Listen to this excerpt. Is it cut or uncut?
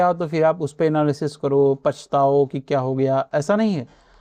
uncut